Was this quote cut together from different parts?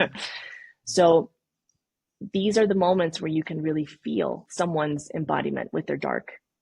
yes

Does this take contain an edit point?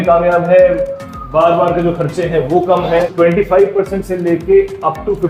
yes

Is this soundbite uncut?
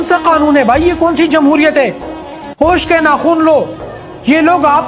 no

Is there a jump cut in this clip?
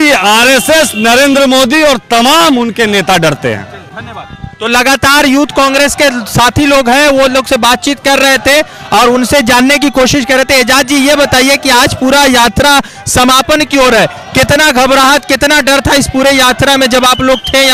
no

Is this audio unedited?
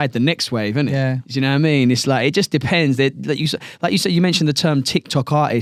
yes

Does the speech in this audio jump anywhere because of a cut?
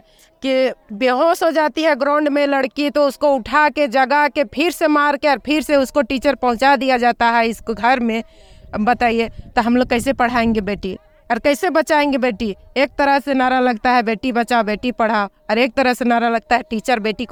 no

